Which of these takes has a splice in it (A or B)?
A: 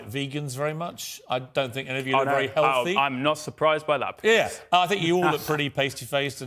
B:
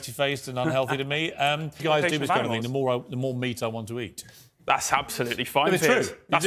B